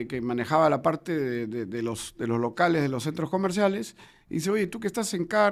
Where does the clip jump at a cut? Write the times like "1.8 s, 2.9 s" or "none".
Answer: none

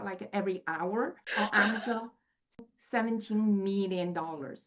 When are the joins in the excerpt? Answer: 1.2 s, 2.6 s

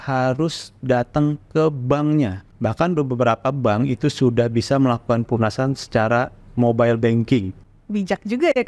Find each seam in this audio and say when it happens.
2.4 s, 6.4 s, 7.6 s

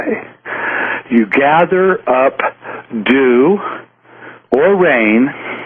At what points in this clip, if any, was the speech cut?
none

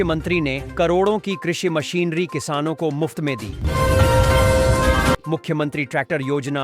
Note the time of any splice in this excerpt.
3.5 s, 5.2 s

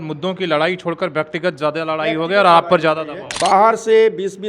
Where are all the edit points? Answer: 3.3 s

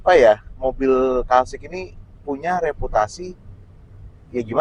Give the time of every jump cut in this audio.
none

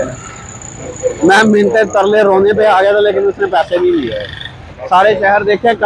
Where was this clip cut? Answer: none

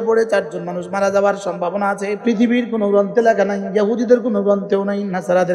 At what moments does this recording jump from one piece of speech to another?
2.2 s

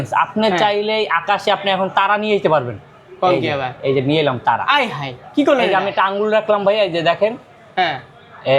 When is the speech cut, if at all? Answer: 5.2 s

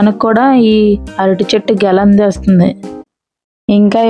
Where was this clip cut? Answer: 3.1 s

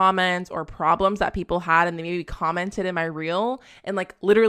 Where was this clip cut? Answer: none

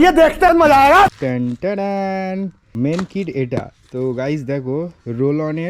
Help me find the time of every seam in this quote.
1.2 s, 2.7 s

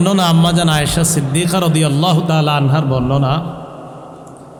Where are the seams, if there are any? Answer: none

